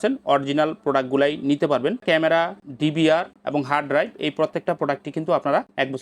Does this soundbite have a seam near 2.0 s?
yes; 1 cut; at 2.0 s

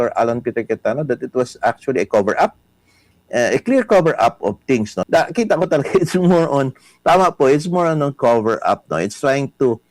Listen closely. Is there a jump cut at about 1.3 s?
no; 1 cut; at 5.0 s

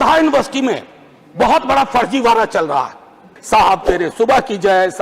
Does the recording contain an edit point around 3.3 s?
yes; 1 cut; at 3.3 s

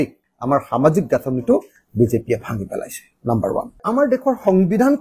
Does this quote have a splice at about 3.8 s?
yes; 1 cut; at 3.8 s

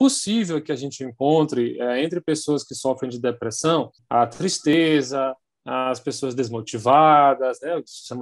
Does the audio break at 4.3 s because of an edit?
yes; 1 cut; at 4.3 s

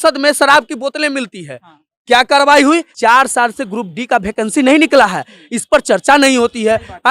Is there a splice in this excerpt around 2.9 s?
yes; 1 cut; at 2.9 s

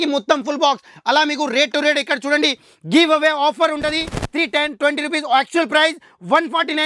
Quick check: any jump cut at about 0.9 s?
no; 0 cuts

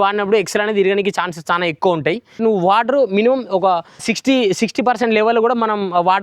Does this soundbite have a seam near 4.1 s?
yes; 2 cuts; at 2.3 s, 4.1 s

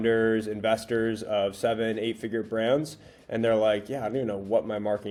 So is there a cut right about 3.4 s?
no; 0 cuts

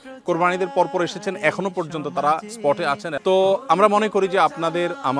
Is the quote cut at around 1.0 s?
no; 1 cut; at 3.1 s

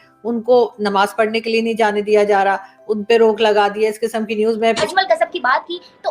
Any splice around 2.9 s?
no; 1 cut; at 4.8 s

